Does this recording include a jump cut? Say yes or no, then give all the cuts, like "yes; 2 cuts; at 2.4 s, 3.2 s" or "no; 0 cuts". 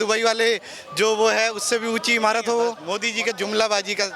yes; 1 cut; at 2.8 s